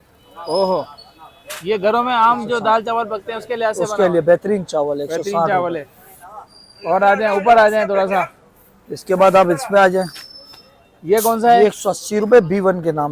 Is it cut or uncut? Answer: uncut